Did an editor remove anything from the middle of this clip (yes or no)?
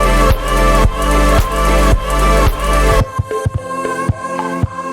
yes